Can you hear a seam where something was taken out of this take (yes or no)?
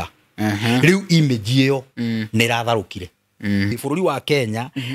yes